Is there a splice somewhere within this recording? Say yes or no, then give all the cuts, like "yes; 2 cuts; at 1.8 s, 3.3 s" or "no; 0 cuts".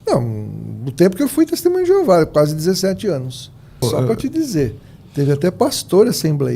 yes; 1 cut; at 3.8 s